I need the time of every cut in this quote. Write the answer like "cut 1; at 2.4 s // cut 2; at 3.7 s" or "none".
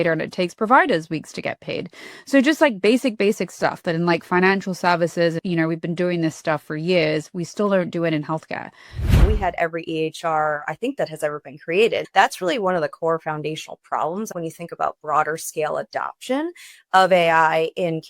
cut 1; at 5.4 s // cut 2; at 9.2 s // cut 3; at 12.0 s // cut 4; at 14.3 s